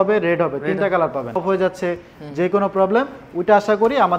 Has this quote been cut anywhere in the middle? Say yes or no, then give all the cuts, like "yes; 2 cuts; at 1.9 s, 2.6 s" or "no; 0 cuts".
yes; 1 cut; at 1.4 s